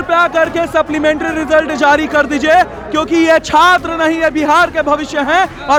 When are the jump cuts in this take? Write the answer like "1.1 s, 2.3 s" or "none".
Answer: none